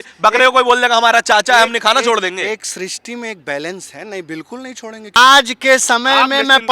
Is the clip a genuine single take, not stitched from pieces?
no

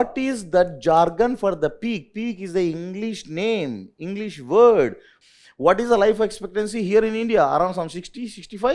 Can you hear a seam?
yes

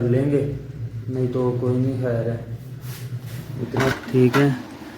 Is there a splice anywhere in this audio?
yes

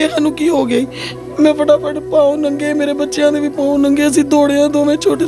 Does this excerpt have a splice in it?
no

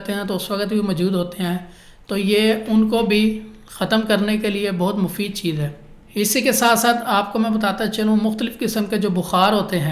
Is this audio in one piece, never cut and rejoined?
yes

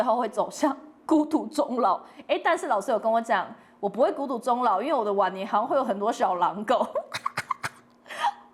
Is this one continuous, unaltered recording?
yes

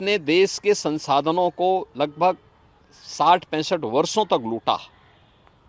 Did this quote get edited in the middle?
no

